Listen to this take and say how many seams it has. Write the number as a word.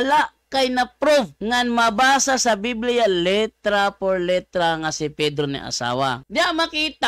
two